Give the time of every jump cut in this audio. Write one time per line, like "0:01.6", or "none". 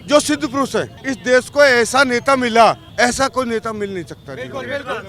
0:02.9